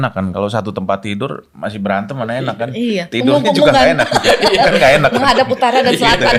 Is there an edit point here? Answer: no; 0 cuts

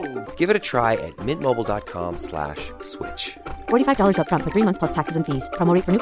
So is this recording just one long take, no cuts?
yes; 0 cuts

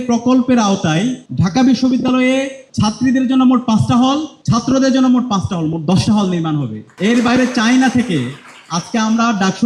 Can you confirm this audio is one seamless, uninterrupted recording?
no; 4 cuts; at 1.2 s, 2.6 s, 4.3 s, 6.8 s

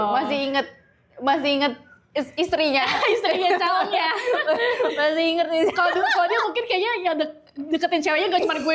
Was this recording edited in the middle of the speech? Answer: no; 0 cuts

